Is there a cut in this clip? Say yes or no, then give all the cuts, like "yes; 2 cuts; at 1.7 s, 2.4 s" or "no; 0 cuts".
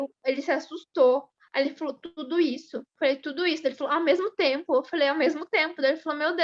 no; 0 cuts